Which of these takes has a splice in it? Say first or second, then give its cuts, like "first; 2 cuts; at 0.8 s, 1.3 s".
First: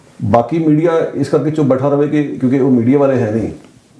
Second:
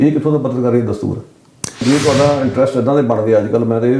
second; 1 cut; at 1.8 s